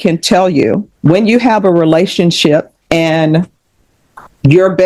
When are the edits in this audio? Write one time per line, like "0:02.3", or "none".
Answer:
0:00.9
0:02.7